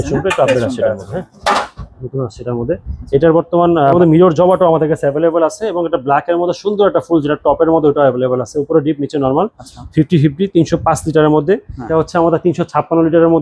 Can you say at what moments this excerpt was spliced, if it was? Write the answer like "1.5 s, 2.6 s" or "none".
3.9 s, 11.9 s